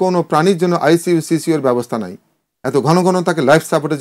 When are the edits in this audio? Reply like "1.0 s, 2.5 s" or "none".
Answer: none

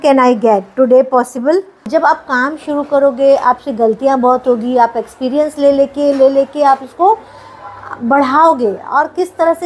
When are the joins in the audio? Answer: 1.9 s

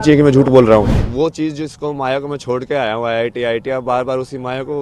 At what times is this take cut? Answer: 1.0 s

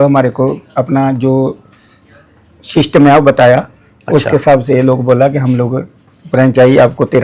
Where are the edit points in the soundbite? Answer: none

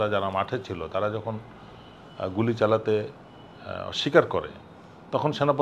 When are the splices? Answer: none

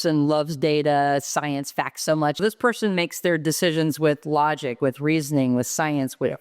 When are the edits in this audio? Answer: 2.4 s

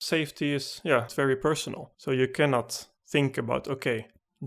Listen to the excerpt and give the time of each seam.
1.1 s

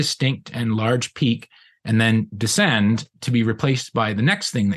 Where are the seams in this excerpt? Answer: 1.9 s, 3.2 s

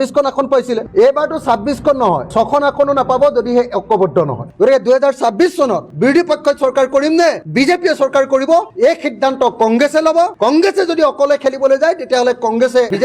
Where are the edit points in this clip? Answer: 0.8 s, 4.5 s, 5.9 s

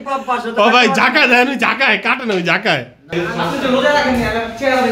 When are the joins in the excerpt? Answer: 3.1 s

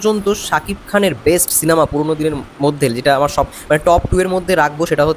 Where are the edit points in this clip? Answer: none

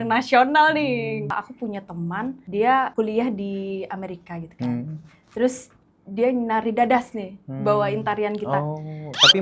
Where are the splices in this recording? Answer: 1.3 s, 2.4 s, 2.9 s

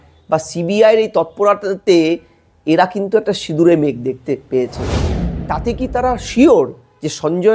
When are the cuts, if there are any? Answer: 5.2 s

